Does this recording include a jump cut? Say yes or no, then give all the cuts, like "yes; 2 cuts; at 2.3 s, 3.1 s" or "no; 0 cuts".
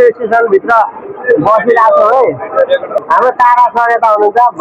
yes; 1 cut; at 2.9 s